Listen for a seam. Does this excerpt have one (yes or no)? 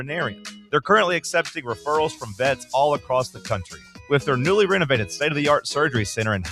no